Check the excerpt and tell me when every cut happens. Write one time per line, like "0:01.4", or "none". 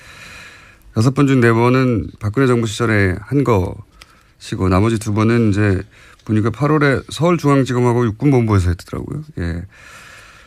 none